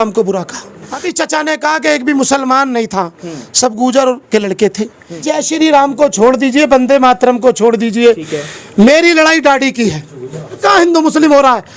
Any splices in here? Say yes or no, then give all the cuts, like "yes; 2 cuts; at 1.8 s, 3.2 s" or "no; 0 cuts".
yes; 3 cuts; at 1.0 s, 5.2 s, 10.6 s